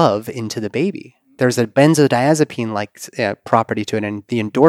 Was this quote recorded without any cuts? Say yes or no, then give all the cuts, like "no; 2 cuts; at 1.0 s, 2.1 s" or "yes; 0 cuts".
yes; 0 cuts